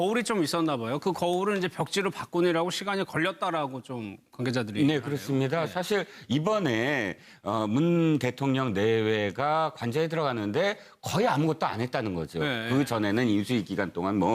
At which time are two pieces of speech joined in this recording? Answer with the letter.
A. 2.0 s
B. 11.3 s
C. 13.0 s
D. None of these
A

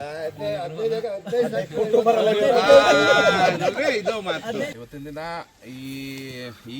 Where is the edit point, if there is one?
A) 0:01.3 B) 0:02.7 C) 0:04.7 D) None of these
C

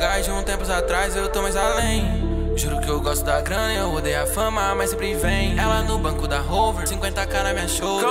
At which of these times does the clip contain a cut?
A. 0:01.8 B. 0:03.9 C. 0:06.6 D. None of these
D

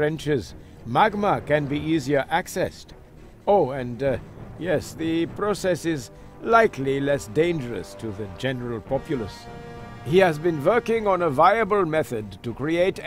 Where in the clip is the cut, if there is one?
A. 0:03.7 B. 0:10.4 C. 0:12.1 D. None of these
D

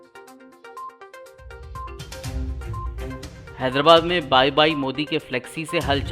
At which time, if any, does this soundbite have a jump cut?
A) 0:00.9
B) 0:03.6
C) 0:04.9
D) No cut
A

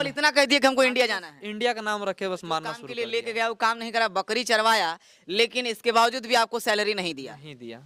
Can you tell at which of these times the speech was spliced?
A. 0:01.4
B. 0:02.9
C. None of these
B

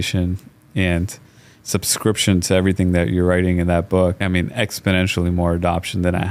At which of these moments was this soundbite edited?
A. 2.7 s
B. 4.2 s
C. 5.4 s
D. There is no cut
B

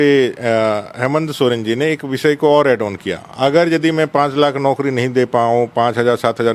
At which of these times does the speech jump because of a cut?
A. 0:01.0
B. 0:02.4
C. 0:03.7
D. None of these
D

